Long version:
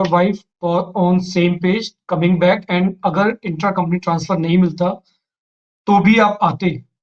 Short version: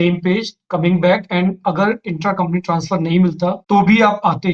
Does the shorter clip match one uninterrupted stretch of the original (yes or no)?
no